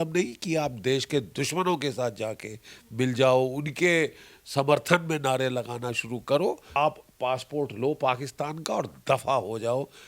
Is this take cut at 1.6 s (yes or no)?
no